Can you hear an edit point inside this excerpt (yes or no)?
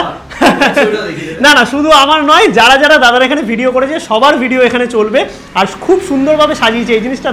no